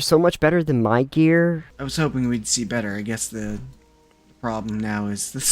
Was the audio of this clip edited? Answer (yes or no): yes